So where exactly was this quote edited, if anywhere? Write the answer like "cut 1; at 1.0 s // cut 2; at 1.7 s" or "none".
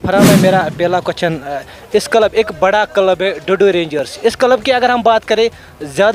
none